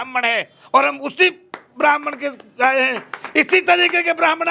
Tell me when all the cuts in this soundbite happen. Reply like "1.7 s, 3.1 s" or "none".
none